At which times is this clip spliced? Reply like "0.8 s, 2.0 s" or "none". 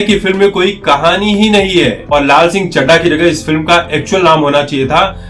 2.0 s